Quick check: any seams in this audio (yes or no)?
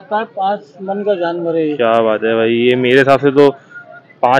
no